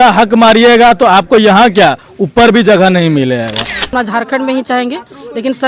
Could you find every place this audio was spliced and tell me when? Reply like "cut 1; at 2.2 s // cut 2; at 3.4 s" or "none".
cut 1; at 3.9 s